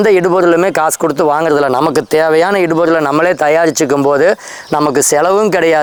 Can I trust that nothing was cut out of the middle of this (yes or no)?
yes